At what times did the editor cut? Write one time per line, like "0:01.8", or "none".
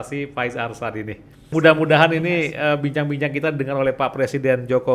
0:01.4